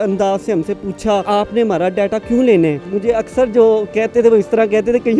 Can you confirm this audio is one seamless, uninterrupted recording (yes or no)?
yes